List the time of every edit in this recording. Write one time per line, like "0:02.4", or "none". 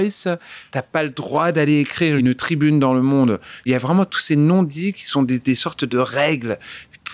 0:02.2
0:03.6